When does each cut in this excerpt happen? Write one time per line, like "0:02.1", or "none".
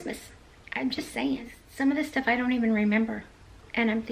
none